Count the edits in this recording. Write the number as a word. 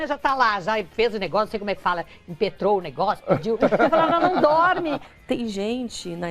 one